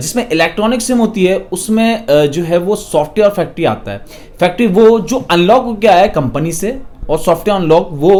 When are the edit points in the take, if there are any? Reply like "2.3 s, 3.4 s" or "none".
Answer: none